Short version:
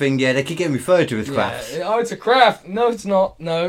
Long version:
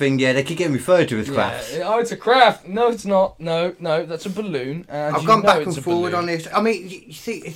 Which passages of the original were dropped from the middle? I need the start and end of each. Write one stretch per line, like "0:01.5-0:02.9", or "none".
none

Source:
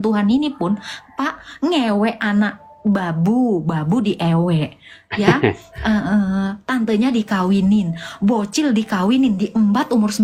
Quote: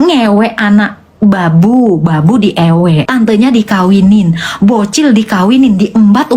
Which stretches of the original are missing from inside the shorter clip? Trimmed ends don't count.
0:04.7-0:06.7

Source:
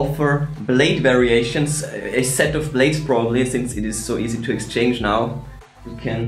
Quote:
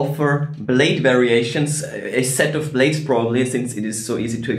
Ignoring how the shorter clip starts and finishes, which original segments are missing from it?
none

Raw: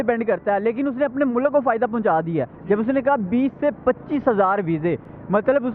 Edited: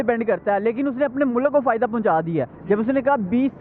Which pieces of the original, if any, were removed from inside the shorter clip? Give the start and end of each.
none

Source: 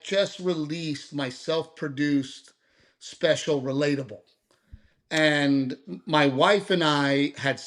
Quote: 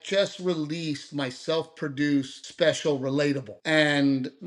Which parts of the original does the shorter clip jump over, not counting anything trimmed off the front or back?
0:02.4-0:03.0
0:04.1-0:05.0

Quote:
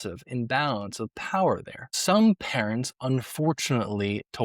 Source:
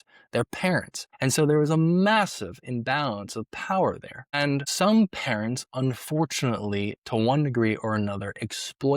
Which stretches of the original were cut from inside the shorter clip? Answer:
0:04.3-0:04.7

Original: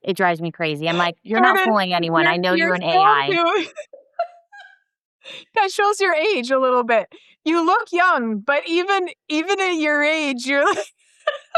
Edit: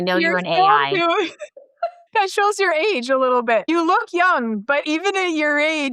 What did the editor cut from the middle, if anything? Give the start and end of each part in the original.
0:04.4-0:05.4
0:07.1-0:07.4
0:08.6-0:09.3

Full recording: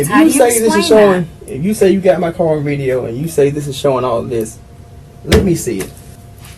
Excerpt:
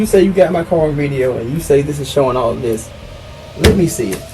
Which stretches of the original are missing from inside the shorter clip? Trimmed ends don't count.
none

